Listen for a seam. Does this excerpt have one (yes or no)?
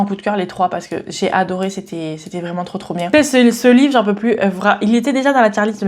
yes